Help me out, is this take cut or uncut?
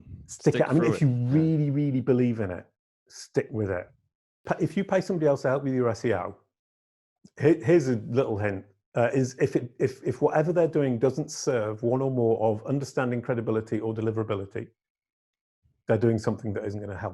cut